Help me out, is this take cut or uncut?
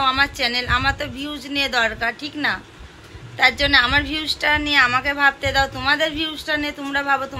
uncut